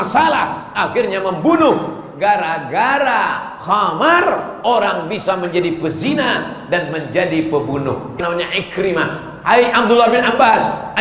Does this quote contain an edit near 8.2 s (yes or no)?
yes